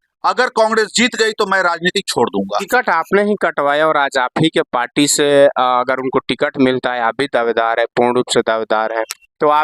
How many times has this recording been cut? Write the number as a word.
one